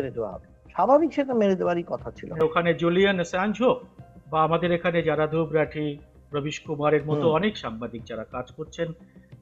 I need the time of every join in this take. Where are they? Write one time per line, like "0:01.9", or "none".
0:02.4